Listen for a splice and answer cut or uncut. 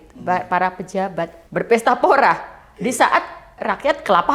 cut